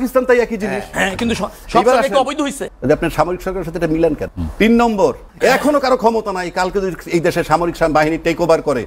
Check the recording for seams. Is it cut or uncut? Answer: cut